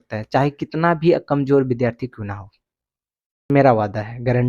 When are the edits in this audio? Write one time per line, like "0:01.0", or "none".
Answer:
0:03.5